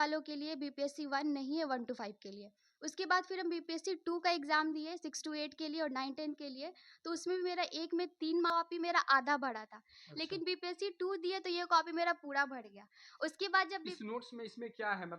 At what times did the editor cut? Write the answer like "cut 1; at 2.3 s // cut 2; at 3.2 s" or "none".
cut 1; at 8.5 s